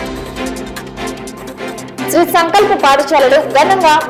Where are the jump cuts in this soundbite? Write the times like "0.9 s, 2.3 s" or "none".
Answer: none